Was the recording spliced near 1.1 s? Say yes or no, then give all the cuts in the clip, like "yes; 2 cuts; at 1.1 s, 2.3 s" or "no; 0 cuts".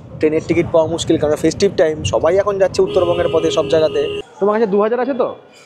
no; 1 cut; at 4.2 s